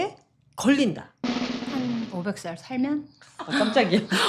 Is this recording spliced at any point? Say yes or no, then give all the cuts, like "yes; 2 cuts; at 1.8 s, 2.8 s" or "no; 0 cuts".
no; 0 cuts